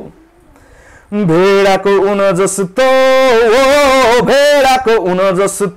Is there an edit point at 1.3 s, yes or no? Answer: no